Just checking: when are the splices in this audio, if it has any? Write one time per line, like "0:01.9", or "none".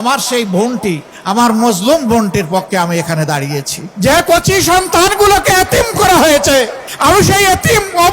0:01.1
0:03.8
0:06.8